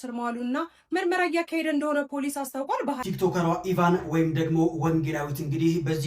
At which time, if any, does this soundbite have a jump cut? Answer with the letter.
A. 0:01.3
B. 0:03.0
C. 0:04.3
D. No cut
B